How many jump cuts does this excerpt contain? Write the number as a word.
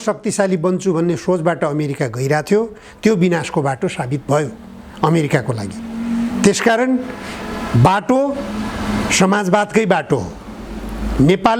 zero